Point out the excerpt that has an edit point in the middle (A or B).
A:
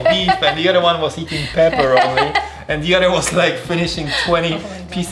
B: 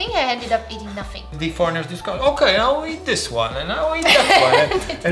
B